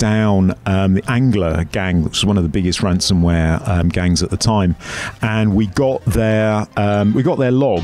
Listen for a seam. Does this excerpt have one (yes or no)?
no